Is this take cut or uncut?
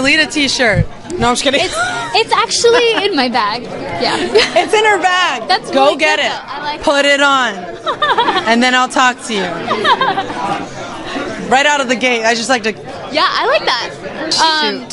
uncut